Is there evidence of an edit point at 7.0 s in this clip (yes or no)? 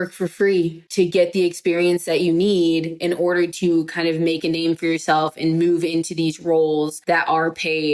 yes